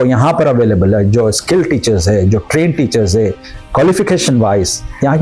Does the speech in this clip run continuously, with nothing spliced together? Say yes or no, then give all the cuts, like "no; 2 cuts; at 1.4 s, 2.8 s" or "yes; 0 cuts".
yes; 0 cuts